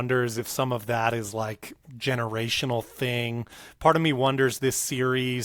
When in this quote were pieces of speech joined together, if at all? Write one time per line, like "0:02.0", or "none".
none